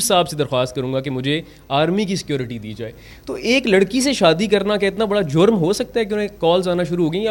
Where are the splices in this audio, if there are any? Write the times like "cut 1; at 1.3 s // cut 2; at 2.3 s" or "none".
none